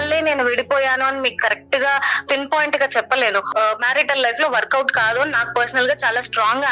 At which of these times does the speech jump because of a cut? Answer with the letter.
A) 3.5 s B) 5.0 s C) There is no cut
A